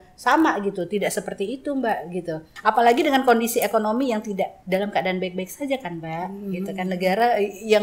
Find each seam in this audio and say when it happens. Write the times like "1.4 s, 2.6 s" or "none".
2.5 s, 4.6 s